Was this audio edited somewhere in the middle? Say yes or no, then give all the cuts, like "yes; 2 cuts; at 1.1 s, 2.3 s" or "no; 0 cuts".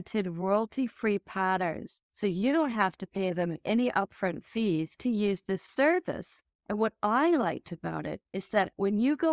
no; 0 cuts